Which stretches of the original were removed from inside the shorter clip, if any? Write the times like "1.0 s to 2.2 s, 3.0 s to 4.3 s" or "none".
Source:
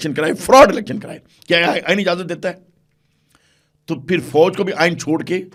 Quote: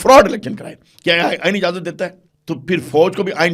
2.7 s to 3.7 s